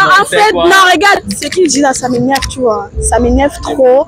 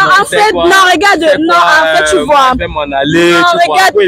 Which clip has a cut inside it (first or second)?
first